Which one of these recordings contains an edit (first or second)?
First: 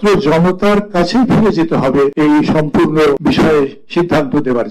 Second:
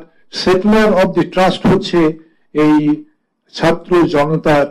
first